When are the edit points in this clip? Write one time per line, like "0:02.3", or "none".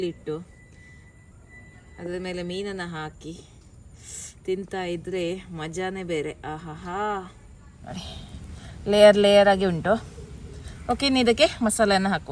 0:07.8